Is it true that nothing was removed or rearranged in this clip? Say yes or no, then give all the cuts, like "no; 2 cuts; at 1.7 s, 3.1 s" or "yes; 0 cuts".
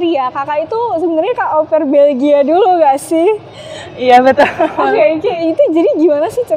yes; 0 cuts